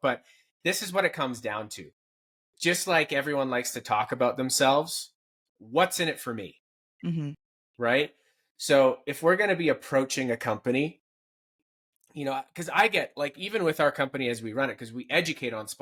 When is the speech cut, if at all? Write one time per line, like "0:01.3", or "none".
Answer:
none